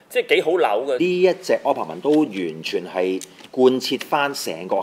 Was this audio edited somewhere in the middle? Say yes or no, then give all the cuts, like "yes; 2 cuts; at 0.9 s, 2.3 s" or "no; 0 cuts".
yes; 1 cut; at 1.0 s